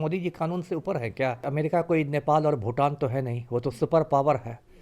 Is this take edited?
yes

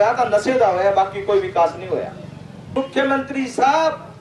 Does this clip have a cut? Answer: yes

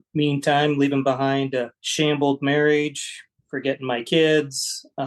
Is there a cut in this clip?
yes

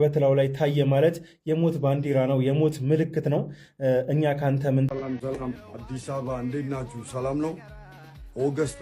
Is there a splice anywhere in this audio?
yes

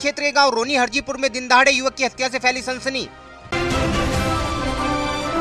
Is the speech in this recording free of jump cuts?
yes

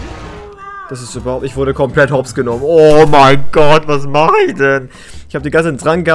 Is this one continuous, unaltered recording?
yes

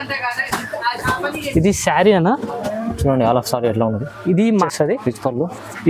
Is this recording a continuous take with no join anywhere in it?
no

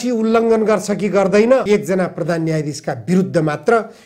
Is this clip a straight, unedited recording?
no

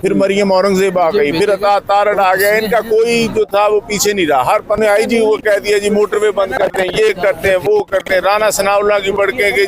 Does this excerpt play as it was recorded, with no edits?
no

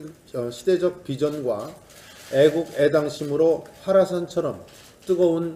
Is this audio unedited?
yes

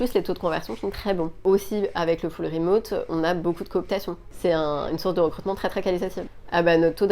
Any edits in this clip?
yes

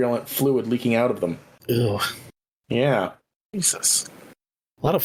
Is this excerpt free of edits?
yes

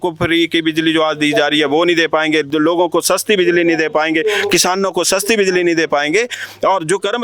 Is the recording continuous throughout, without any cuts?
yes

